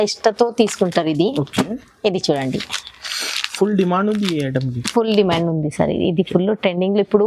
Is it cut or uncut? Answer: uncut